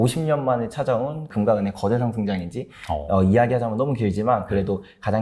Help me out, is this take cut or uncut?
uncut